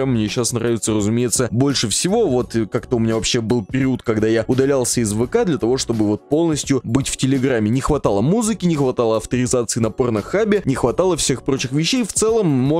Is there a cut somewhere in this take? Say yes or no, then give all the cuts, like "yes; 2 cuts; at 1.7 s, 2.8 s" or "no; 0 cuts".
no; 0 cuts